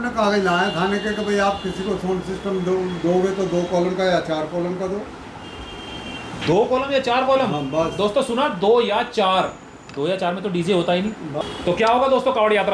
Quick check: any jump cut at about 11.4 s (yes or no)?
yes